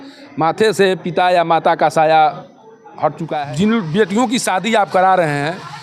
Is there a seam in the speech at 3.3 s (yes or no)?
yes